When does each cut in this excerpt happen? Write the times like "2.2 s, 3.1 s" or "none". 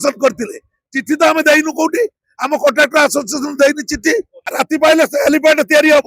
4.4 s